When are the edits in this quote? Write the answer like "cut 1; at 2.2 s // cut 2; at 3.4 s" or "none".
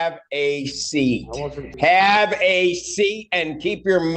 cut 1; at 1.7 s